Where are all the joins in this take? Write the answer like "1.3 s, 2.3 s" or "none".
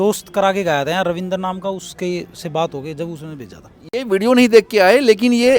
none

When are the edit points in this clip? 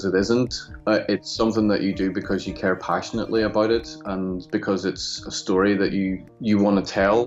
6.3 s

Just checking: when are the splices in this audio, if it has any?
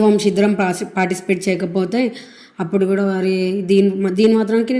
none

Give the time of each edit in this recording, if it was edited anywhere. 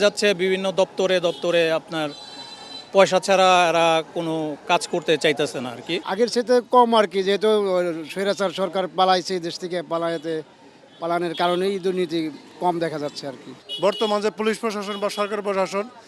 none

